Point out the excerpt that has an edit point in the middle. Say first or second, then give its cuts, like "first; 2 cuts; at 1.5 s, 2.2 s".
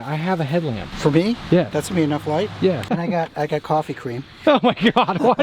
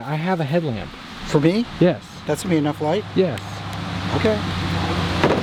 first; 3 cuts; at 0.9 s, 1.7 s, 2.9 s